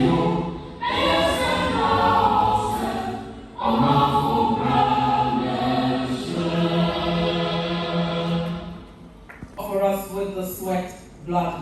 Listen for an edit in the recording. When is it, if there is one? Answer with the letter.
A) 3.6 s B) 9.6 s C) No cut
C